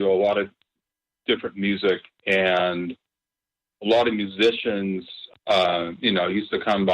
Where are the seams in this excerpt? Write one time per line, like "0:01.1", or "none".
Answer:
0:05.2